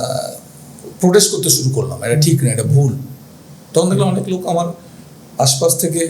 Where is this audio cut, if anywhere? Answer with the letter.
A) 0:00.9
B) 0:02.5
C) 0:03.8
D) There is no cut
D